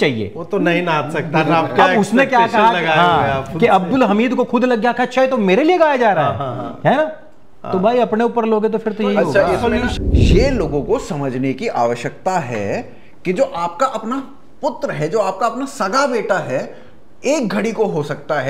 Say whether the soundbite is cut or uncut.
cut